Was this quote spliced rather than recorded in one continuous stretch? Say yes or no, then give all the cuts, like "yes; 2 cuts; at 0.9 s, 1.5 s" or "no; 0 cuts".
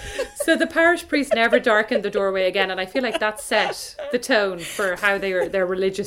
no; 0 cuts